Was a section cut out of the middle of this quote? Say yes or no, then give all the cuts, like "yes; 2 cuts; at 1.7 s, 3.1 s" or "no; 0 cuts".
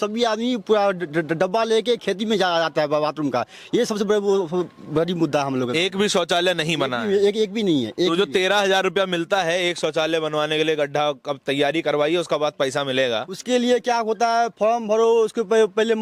no; 0 cuts